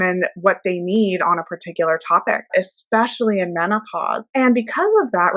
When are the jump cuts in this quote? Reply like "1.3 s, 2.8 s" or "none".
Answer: 2.5 s, 4.2 s